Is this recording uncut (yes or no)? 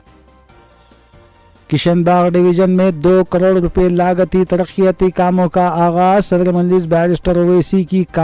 yes